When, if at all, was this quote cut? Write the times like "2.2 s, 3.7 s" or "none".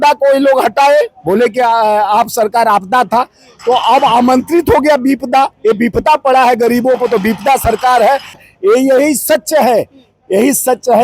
8.4 s